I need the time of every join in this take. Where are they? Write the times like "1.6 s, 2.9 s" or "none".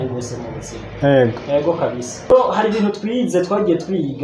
2.3 s